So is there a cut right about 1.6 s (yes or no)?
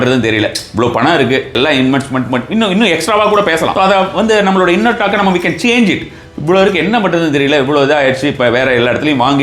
yes